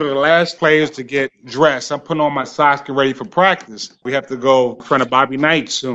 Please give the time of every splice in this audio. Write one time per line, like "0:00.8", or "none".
0:04.0
0:04.8